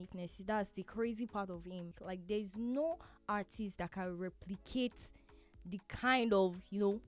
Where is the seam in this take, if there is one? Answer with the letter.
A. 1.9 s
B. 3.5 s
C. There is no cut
A